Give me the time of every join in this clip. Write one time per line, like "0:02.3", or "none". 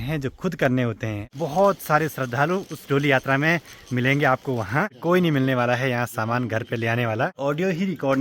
0:01.2
0:04.9
0:07.3